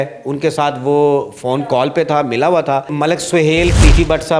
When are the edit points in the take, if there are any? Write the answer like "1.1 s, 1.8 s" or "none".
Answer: 2.9 s